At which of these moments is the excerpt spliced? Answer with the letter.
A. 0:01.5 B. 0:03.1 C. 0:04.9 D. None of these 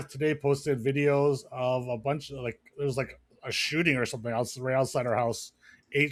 D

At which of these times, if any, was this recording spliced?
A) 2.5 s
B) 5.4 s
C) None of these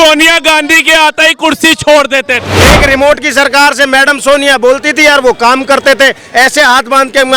A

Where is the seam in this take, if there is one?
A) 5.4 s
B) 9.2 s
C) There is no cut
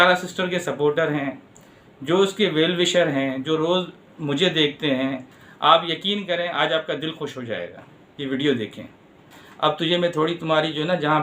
B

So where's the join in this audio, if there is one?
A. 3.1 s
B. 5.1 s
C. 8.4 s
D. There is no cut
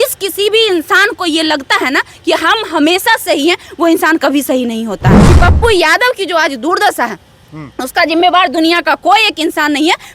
B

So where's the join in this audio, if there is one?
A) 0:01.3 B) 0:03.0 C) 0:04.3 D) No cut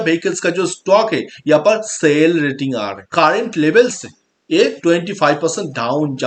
B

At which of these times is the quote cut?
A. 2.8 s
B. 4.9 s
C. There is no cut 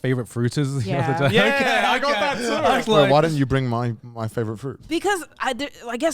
A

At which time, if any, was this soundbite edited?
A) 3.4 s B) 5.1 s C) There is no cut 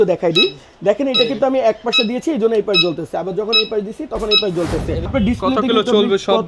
B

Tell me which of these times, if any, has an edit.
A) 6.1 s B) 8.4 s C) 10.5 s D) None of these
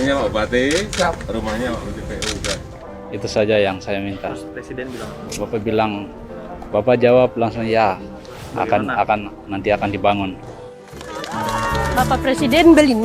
C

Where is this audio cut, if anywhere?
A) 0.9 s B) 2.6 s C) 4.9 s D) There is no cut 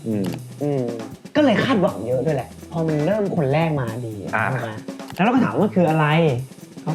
C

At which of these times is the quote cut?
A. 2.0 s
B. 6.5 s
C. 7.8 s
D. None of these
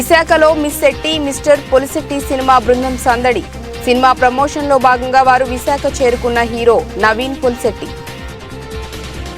C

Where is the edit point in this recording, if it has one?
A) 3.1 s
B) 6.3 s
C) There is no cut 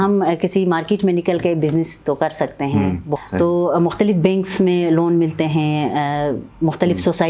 A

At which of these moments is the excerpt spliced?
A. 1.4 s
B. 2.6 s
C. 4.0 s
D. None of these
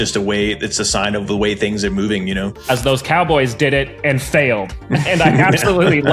B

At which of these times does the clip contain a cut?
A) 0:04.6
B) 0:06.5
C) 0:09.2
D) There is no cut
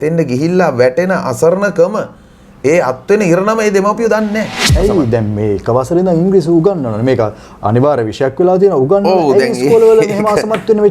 A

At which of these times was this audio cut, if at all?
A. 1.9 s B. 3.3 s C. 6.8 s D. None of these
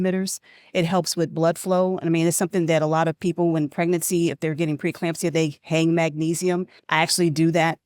C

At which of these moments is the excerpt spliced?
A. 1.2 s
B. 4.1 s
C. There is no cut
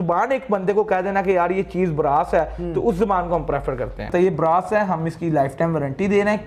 B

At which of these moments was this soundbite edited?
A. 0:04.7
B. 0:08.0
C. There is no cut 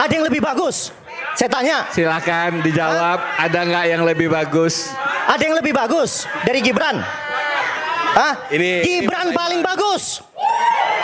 C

